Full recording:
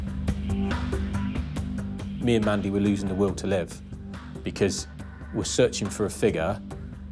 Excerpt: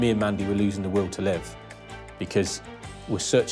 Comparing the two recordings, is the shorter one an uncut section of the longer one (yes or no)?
yes